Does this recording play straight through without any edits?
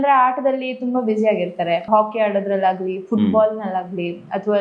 no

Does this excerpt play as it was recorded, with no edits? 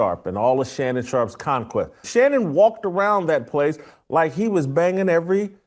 no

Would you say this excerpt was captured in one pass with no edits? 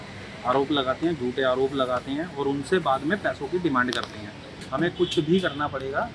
no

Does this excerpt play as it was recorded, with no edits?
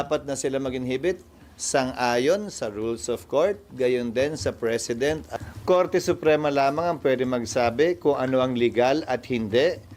no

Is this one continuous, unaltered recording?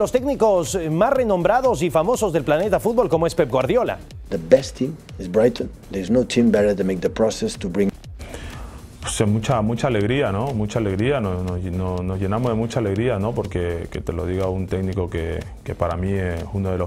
yes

